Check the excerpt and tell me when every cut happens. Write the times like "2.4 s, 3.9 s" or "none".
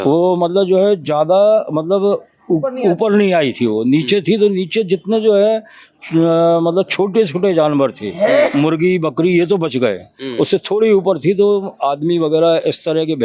none